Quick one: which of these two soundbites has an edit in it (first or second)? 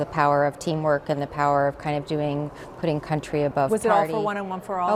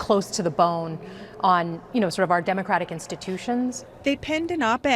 second